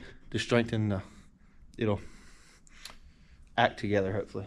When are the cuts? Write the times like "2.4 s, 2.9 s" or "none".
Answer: none